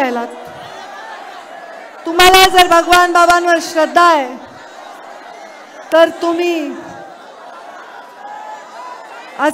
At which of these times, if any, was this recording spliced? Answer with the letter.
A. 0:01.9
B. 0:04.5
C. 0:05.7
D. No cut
D